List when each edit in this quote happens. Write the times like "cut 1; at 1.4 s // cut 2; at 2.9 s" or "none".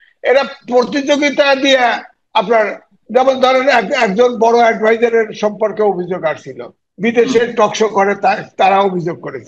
none